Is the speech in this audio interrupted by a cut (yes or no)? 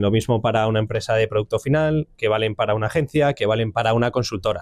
no